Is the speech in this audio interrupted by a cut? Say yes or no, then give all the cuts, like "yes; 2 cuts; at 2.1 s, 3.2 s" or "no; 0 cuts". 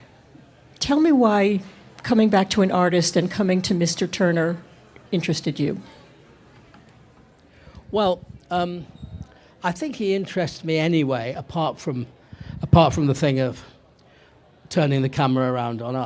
yes; 1 cut; at 7.7 s